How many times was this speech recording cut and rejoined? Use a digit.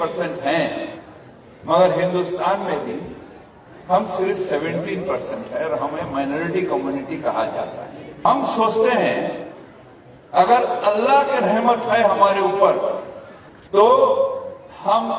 1